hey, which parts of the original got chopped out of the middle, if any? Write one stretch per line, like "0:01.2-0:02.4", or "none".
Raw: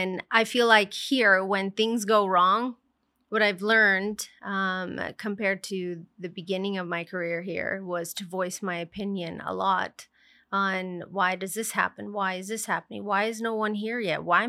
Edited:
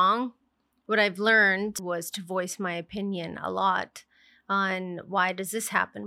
0:04.2-0:07.8